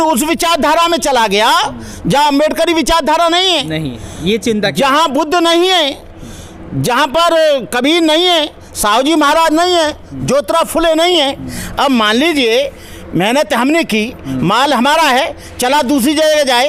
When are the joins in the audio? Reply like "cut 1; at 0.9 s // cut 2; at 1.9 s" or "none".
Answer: none